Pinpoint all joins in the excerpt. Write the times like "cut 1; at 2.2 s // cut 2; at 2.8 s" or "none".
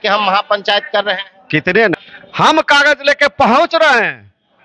cut 1; at 1.9 s